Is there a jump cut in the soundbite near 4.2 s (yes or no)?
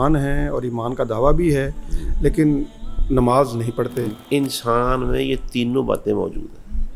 yes